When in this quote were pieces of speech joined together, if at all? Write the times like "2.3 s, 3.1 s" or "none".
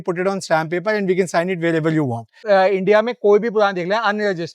2.4 s